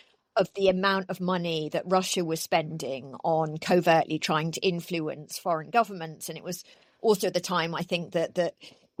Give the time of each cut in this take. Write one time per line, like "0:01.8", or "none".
none